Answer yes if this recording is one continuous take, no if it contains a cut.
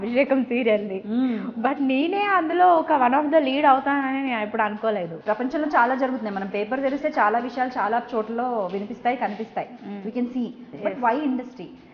no